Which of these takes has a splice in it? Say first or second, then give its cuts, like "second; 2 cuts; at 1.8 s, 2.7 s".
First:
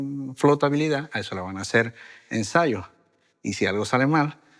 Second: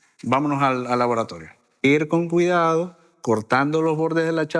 second; 1 cut; at 1.8 s